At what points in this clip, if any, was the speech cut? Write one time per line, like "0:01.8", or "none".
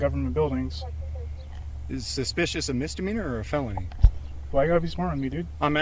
none